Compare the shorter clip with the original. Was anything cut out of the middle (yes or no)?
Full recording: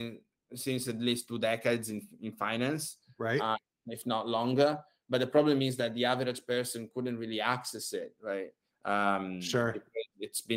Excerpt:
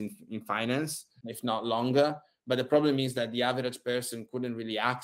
yes